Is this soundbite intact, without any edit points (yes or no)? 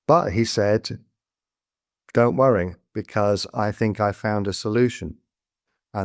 yes